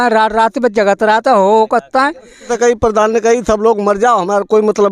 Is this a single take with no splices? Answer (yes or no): no